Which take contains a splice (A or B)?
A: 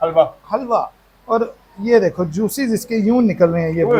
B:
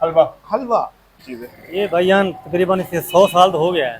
B